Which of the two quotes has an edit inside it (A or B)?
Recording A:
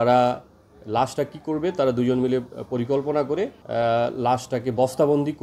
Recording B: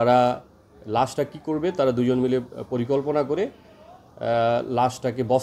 A